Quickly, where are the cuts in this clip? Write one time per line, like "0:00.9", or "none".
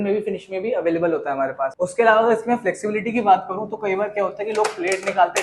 0:01.6